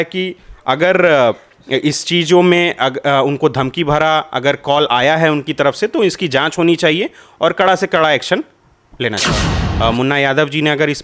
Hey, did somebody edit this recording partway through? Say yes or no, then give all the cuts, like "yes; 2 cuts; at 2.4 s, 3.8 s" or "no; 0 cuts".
yes; 1 cut; at 9.6 s